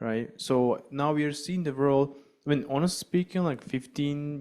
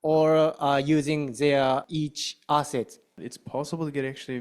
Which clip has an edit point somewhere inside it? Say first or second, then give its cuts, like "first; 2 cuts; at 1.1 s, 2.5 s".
second; 2 cuts; at 1.9 s, 3.1 s